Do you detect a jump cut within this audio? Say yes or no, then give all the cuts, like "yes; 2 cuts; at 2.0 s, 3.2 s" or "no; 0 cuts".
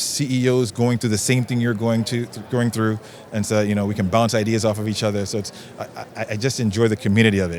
no; 0 cuts